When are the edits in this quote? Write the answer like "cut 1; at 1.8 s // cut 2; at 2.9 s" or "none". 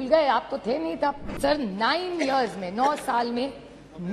cut 1; at 1.3 s

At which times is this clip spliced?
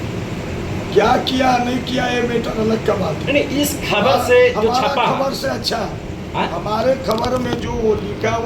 none

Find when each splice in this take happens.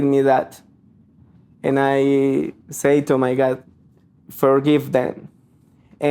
cut 1; at 3.6 s

